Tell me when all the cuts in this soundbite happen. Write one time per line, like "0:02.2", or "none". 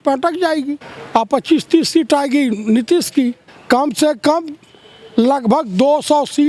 0:00.9
0:03.5